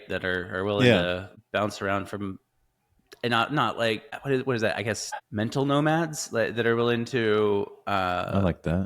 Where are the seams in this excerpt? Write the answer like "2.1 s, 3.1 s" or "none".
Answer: 1.3 s, 4.1 s, 5.2 s